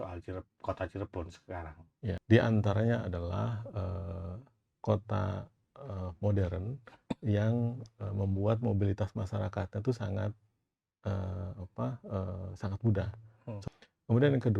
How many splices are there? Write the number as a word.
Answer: two